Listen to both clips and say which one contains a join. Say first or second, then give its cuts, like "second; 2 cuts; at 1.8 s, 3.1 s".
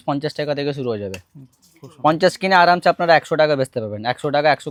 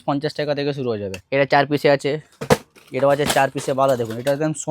second; 1 cut; at 1.2 s